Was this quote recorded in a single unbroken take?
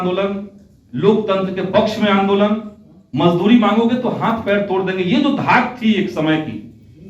no; 1 cut; at 3.0 s

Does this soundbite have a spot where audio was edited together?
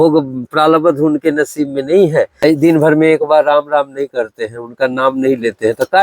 yes; 1 cut; at 2.3 s

